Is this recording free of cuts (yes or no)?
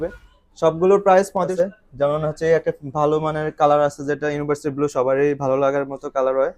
no